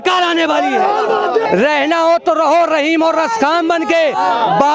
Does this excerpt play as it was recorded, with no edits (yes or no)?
no